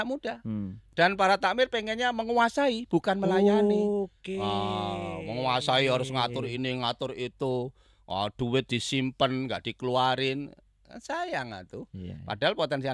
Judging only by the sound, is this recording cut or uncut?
uncut